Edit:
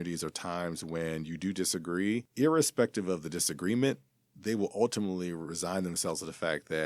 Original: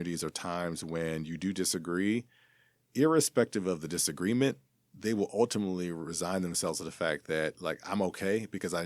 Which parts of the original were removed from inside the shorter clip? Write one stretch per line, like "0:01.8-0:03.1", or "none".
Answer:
0:02.3-0:02.9